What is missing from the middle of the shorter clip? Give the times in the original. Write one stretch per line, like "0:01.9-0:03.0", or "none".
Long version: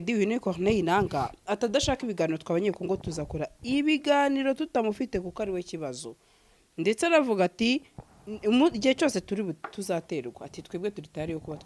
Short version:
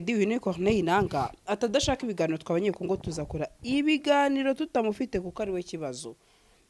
none